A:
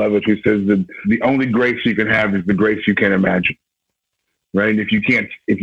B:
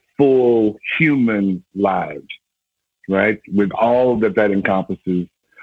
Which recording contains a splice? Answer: A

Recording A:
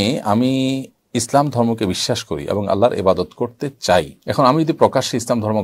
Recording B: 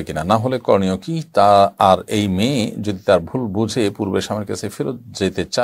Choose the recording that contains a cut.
A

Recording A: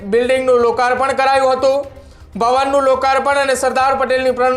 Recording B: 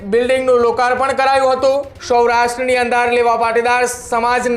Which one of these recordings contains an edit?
B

